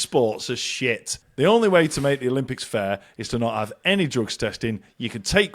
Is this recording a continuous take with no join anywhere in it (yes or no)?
no